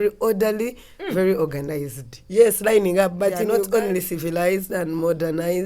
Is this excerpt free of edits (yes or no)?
no